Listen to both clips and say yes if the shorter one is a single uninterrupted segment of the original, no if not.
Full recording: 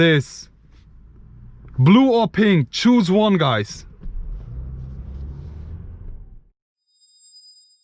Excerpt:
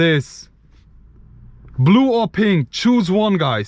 yes